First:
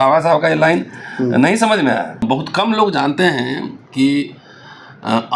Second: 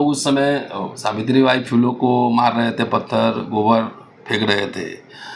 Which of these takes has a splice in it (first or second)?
first